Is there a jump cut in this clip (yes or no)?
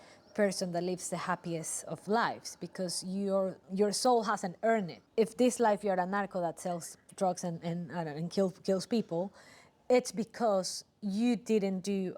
yes